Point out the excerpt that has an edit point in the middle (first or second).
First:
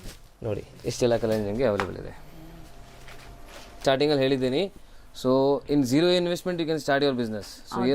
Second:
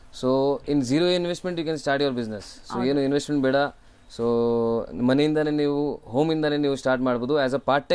first